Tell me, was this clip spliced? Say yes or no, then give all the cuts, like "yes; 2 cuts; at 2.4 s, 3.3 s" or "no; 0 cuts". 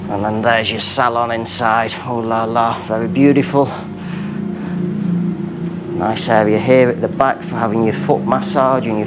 no; 0 cuts